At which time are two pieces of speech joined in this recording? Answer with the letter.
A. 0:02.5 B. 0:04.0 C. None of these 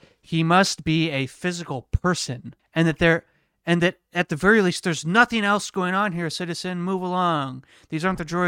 A